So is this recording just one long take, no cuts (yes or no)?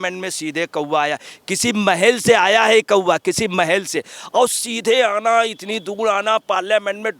yes